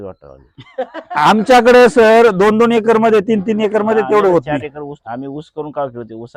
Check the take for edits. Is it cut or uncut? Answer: uncut